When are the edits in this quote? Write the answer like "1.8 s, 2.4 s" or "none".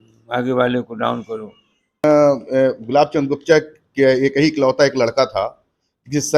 2.0 s